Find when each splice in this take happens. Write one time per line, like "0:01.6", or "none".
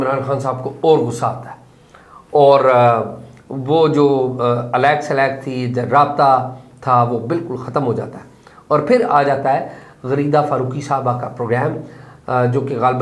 none